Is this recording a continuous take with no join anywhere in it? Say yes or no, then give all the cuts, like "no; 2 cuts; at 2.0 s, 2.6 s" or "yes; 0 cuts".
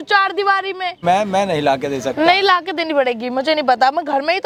yes; 0 cuts